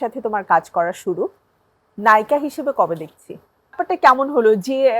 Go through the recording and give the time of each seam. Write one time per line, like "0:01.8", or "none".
0:03.8